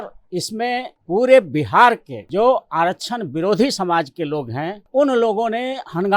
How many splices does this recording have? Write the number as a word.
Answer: three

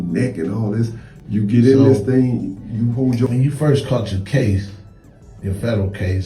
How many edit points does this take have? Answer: one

